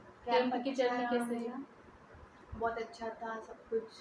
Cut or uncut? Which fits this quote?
uncut